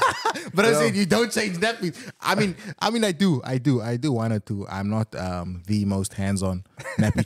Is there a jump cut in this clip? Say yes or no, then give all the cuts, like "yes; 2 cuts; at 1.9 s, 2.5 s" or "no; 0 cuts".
no; 0 cuts